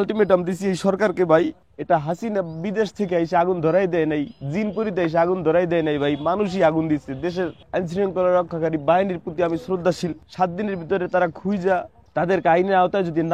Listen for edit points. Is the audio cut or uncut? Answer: cut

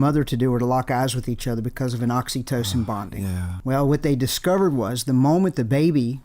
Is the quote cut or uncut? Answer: cut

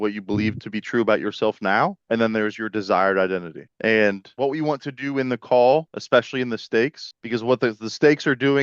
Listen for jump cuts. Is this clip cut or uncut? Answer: cut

